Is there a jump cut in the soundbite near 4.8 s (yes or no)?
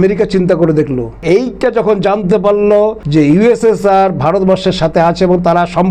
no